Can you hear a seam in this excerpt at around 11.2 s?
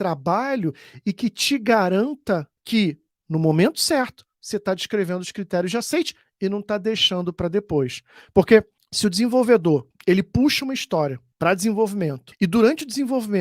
yes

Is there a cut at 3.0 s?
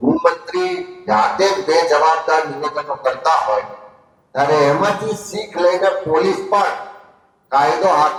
no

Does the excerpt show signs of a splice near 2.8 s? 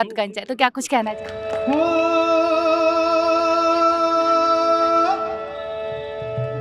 no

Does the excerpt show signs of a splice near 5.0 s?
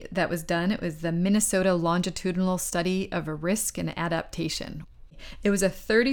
yes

